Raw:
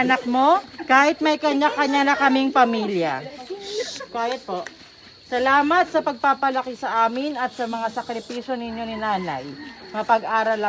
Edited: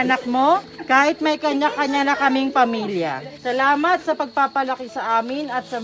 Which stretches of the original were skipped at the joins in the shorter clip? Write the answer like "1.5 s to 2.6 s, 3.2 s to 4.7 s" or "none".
3.3 s to 5.1 s

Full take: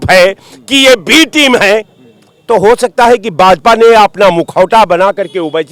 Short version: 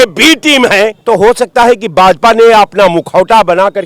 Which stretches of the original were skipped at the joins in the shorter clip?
1.9 s to 2.4 s

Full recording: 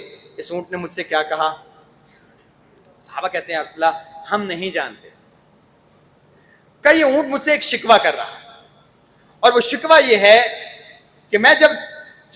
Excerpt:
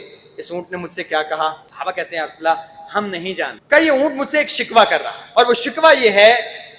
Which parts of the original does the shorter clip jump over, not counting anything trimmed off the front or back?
1.7 s to 3.0 s, 4.9 s to 6.7 s, 8.3 s to 9.2 s

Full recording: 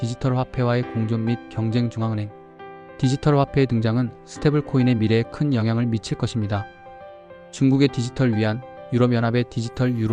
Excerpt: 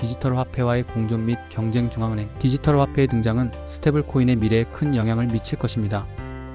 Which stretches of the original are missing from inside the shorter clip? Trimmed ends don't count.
2.3 s to 2.9 s

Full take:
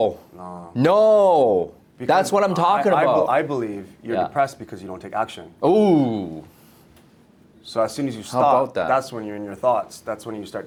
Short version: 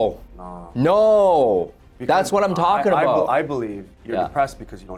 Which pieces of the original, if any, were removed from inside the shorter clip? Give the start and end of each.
none

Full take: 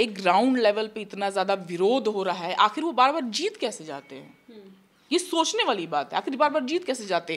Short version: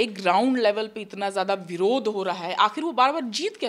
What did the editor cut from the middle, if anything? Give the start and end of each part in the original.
none

